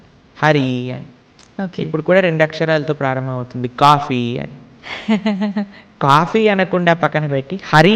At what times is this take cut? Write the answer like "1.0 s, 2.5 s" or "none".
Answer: 6.0 s